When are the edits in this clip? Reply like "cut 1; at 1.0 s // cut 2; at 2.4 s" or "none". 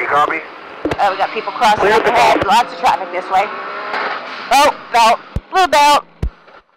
cut 1; at 1.0 s